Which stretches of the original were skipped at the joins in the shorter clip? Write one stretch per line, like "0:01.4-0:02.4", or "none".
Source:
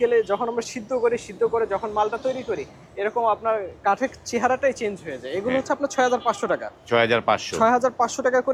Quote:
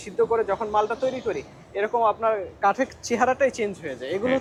none